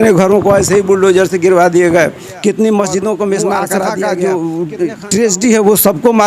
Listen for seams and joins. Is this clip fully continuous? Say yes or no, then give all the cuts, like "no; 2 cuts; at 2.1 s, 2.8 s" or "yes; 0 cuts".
no; 1 cut; at 3.9 s